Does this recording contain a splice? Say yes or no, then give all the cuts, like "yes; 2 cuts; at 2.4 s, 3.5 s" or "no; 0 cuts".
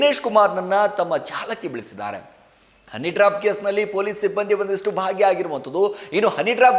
no; 0 cuts